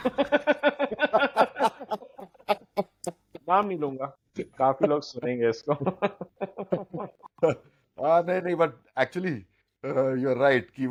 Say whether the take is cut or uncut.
uncut